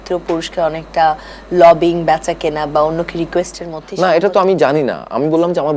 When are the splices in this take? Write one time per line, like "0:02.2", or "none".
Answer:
none